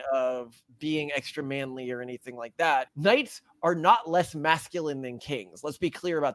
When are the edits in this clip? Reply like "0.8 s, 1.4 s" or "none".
2.9 s